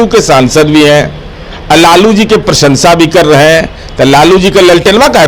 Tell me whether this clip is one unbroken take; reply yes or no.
yes